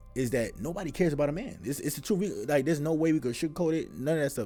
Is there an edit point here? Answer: no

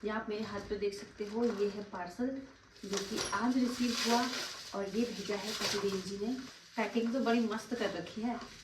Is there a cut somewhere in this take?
yes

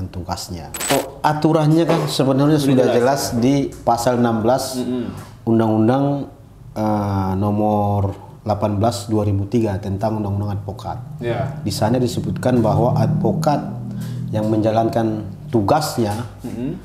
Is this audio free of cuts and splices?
no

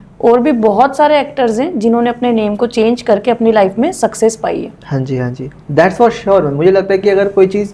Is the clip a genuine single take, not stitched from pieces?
yes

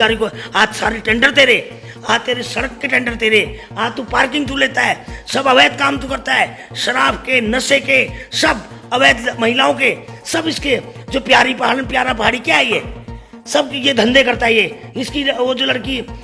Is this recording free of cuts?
yes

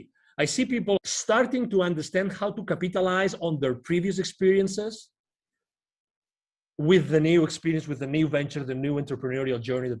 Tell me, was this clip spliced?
yes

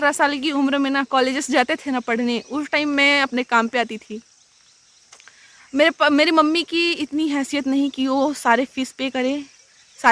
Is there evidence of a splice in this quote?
no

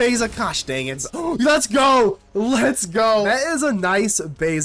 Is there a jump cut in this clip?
yes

